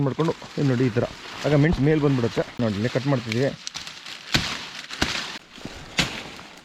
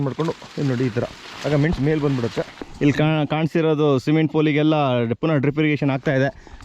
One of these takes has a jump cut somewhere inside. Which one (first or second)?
second